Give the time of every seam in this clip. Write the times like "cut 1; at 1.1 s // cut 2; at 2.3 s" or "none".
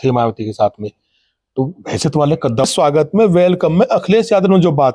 cut 1; at 2.6 s